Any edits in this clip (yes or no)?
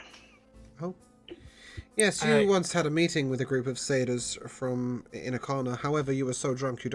no